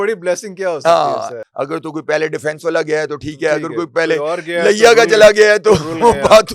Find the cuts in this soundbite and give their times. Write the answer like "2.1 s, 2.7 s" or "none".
1.4 s